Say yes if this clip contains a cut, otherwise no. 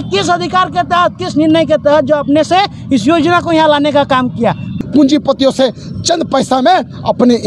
yes